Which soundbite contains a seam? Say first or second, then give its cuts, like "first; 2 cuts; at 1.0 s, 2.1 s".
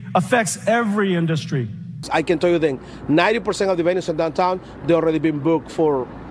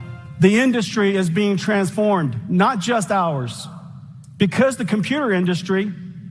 first; 1 cut; at 2.0 s